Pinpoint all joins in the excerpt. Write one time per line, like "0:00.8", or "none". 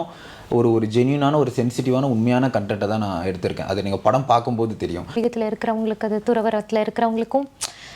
0:05.1

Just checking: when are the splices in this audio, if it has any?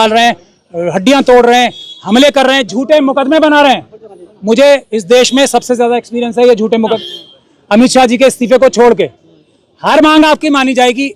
0:07.0

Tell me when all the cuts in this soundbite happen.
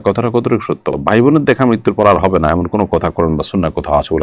none

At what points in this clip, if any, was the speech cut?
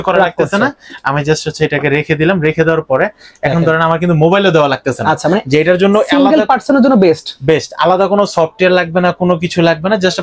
none

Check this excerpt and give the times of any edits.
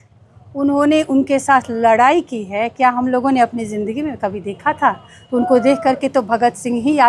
none

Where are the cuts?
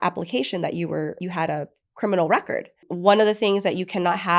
0:01.2
0:02.9

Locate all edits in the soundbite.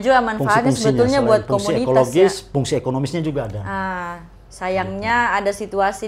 none

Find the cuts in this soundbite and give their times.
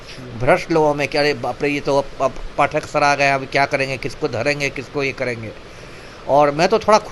none

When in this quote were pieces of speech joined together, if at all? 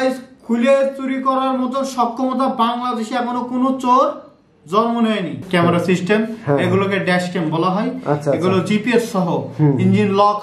0:05.4

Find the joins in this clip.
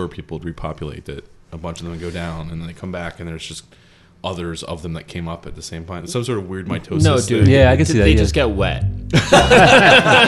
none

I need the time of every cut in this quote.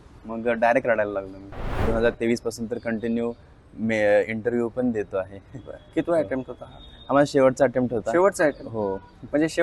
0:01.7

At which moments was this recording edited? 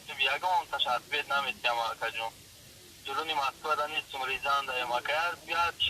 none

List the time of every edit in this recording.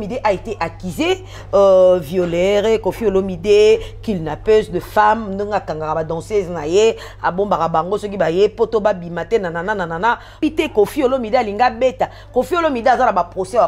0:10.4

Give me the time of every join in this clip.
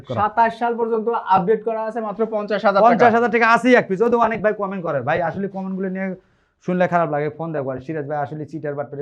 none

